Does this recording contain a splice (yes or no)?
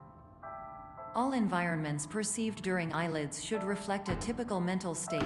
yes